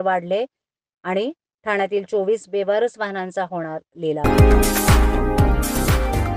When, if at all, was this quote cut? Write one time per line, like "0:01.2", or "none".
0:04.2

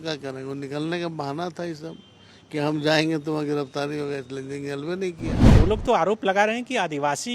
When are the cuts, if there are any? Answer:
0:05.4

